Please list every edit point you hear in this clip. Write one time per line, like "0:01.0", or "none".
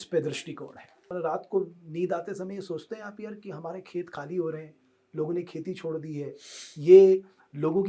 0:01.1